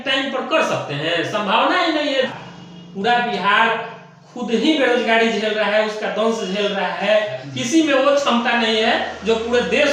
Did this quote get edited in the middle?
yes; 2 cuts; at 2.3 s, 7.4 s

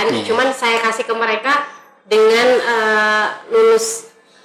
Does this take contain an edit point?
no; 0 cuts

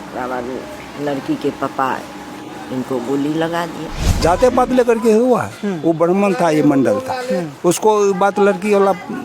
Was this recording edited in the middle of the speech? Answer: yes; 1 cut; at 4.2 s

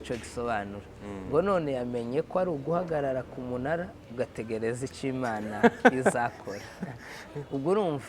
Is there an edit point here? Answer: no; 0 cuts

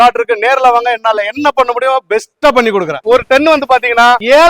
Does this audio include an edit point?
yes; 1 cut; at 3.0 s

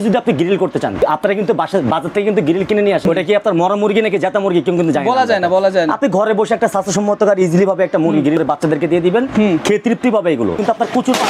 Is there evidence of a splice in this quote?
yes; 4 cuts; at 1.0 s, 3.0 s, 8.4 s, 10.6 s

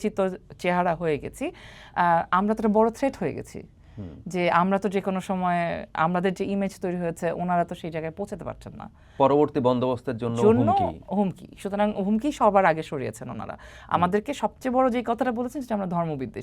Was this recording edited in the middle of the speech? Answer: no; 0 cuts

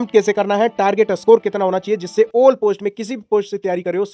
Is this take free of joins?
yes; 0 cuts

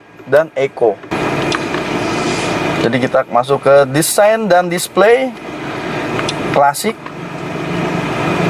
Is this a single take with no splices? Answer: no; 1 cut; at 1.1 s

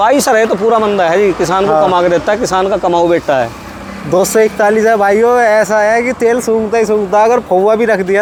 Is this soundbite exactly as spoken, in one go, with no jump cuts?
yes; 0 cuts

